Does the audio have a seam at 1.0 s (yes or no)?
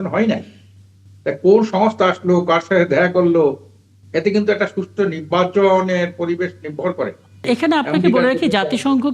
no